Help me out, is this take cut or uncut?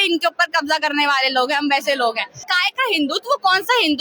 cut